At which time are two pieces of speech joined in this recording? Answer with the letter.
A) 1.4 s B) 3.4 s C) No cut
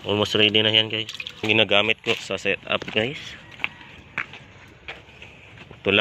A